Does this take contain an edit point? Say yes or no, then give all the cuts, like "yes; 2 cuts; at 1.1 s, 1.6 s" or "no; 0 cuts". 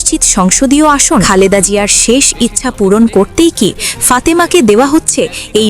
yes; 1 cut; at 1.3 s